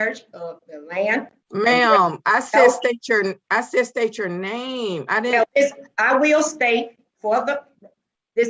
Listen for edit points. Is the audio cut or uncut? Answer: cut